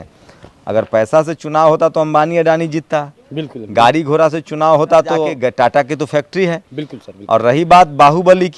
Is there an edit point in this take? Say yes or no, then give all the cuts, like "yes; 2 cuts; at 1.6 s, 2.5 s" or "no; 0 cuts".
yes; 1 cut; at 5.4 s